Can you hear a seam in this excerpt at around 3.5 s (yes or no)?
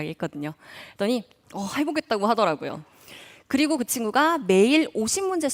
no